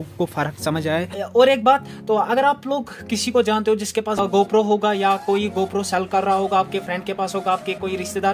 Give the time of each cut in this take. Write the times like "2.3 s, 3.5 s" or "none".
1.2 s